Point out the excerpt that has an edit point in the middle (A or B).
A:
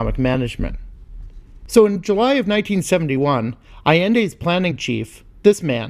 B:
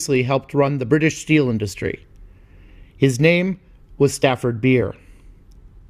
A